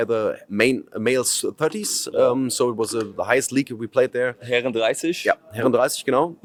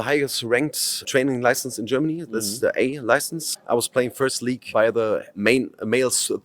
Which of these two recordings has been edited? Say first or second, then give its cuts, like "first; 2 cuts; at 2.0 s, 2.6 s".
second; 2 cuts; at 1.0 s, 3.5 s